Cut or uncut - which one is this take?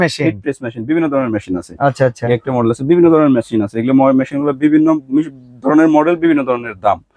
uncut